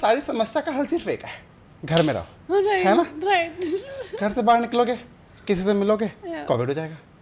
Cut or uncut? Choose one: uncut